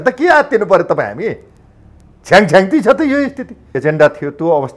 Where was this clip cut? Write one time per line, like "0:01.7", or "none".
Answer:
0:03.7